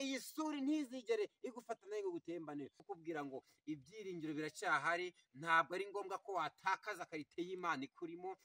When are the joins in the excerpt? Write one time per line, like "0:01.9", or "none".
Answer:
0:02.9